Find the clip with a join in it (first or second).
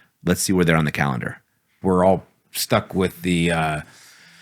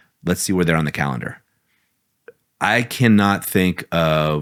first